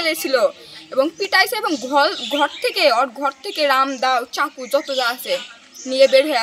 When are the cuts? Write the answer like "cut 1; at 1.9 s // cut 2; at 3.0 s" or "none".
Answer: none